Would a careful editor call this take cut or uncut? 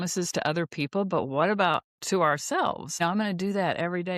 cut